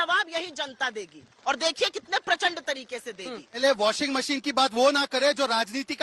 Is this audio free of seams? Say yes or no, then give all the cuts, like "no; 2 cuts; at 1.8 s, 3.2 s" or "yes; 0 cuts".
no; 1 cut; at 3.6 s